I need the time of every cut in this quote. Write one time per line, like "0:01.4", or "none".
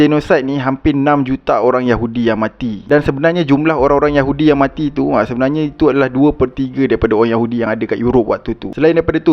none